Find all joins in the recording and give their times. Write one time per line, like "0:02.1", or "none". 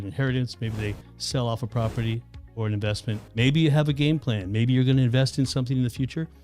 0:03.2